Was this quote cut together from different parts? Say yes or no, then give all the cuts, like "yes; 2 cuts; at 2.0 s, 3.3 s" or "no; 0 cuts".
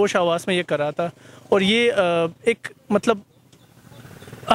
no; 0 cuts